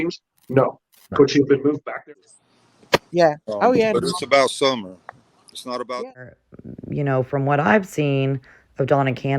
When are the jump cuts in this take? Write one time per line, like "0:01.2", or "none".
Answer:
0:02.1
0:06.3